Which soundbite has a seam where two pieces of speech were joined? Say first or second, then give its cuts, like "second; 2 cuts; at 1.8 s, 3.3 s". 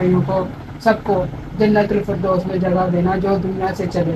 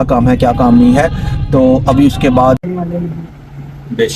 second; 1 cut; at 2.6 s